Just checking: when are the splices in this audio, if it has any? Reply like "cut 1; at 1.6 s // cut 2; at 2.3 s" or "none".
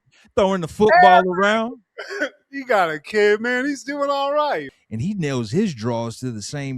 cut 1; at 4.8 s